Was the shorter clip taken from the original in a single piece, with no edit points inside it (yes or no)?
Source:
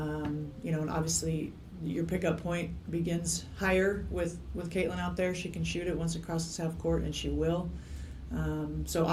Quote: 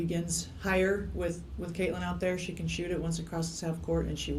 yes